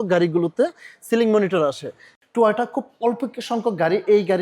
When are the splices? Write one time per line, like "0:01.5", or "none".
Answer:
0:02.0

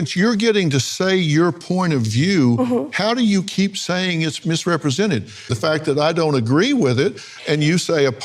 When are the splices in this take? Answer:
none

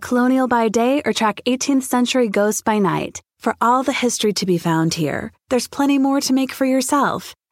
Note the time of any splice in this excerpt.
none

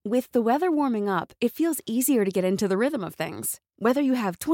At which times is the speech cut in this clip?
none

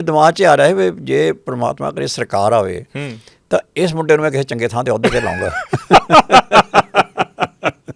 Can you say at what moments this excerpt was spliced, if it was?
none

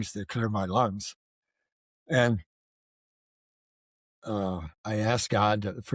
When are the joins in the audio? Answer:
0:04.7

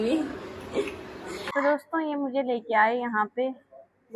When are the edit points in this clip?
0:01.5

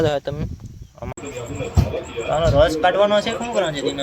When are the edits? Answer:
0:01.1

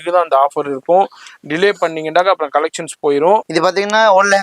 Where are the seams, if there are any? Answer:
0:03.5

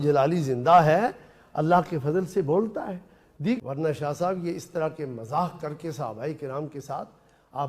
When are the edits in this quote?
0:03.6

